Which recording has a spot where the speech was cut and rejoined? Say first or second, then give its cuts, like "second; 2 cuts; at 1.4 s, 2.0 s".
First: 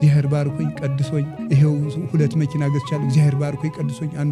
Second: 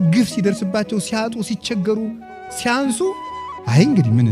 first; 1 cut; at 1.4 s